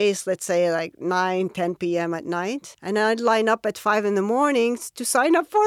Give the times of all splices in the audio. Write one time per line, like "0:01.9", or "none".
0:02.7